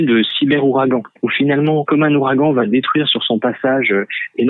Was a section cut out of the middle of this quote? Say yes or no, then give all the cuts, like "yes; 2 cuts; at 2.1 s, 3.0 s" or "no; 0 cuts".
yes; 1 cut; at 1.9 s